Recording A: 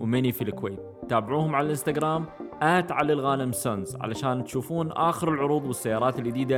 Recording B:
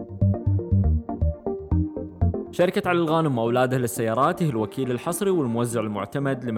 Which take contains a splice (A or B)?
B